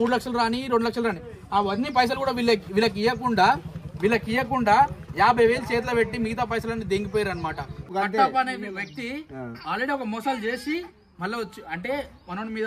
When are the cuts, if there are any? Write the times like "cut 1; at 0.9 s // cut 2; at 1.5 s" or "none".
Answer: cut 1; at 7.9 s